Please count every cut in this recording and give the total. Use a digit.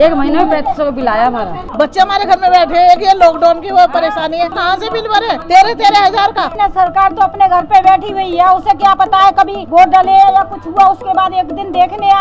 3